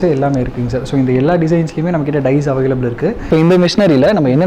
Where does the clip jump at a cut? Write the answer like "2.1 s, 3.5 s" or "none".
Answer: 3.2 s